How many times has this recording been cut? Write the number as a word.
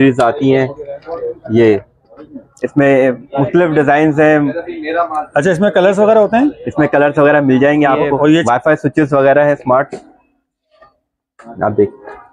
one